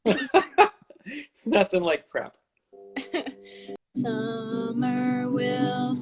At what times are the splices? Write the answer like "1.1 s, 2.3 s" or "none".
3.8 s